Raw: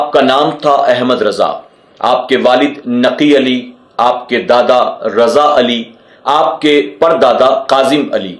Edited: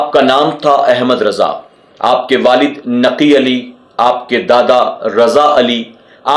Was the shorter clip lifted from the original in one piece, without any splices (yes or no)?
yes